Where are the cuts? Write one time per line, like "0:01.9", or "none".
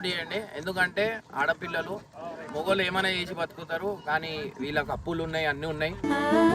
none